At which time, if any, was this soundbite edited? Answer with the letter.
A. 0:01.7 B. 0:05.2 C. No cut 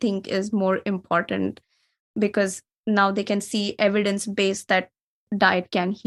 B